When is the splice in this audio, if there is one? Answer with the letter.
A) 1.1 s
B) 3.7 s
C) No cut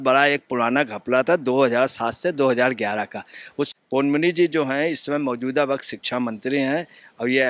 B